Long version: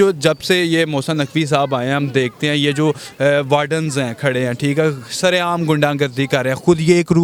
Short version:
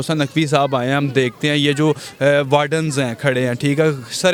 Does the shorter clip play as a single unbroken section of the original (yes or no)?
yes